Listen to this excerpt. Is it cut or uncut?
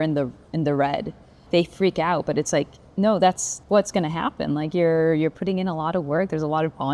cut